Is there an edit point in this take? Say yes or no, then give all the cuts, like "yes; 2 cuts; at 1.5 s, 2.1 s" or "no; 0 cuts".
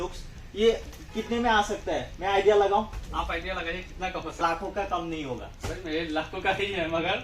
yes; 1 cut; at 4.4 s